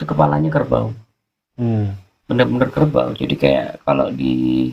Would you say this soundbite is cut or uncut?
uncut